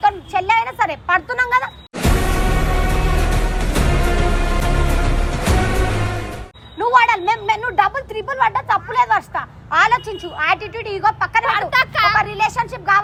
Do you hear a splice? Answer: no; 0 cuts

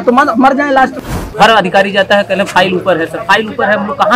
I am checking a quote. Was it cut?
yes; 1 cut; at 1.3 s

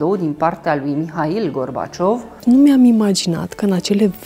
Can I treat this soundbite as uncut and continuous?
no; 1 cut; at 2.4 s

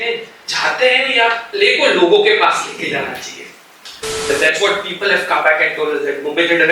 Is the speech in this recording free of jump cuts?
no; 1 cut; at 4.3 s

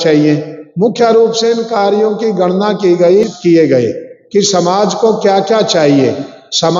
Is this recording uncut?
no; 1 cut; at 3.3 s

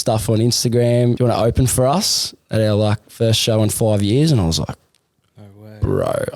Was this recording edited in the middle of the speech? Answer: yes; 1 cut; at 1.2 s

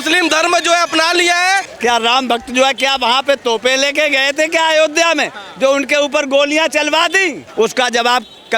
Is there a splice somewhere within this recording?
yes; 2 cuts; at 1.7 s, 7.4 s

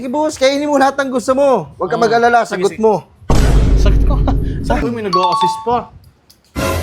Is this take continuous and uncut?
no; 1 cut; at 4.8 s

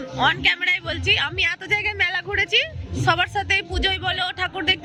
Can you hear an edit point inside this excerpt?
no; 0 cuts

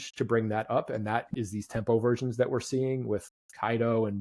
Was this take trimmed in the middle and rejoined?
no; 0 cuts

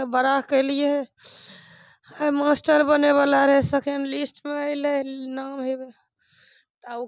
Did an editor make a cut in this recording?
no; 0 cuts

